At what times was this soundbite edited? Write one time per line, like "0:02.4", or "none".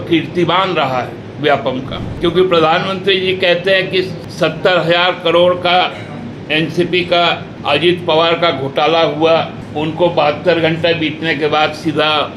0:02.0
0:04.2
0:07.5
0:09.6